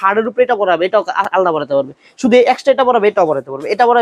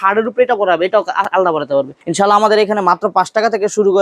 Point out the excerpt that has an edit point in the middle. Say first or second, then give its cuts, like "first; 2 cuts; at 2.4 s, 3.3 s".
second; 1 cut; at 2.0 s